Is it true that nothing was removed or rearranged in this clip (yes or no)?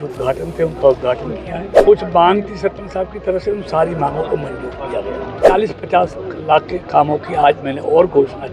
no